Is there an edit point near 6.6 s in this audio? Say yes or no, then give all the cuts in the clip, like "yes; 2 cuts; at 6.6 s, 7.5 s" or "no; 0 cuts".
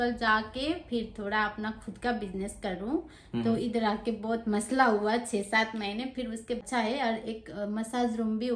yes; 1 cut; at 6.6 s